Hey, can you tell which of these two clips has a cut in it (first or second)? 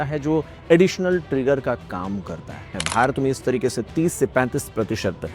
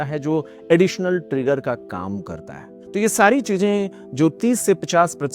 first